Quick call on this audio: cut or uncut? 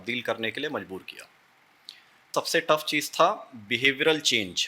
cut